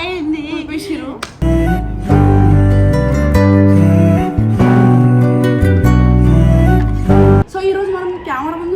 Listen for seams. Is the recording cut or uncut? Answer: cut